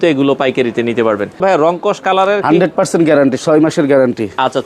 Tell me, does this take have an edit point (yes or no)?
yes